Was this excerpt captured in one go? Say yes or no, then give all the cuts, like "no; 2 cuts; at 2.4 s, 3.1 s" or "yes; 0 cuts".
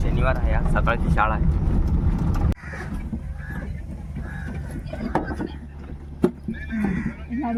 yes; 0 cuts